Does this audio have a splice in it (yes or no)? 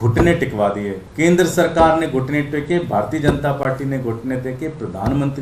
yes